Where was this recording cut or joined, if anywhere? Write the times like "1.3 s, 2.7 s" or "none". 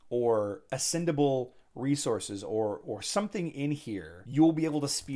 none